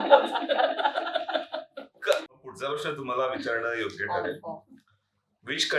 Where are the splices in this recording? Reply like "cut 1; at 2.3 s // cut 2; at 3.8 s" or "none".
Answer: cut 1; at 2.3 s